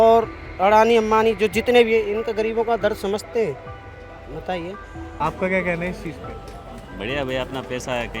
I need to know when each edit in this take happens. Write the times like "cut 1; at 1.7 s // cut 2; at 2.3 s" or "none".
cut 1; at 5.1 s